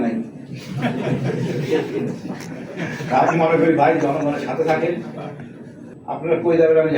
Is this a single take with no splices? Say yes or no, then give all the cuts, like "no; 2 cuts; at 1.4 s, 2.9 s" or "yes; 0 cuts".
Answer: no; 1 cut; at 5.9 s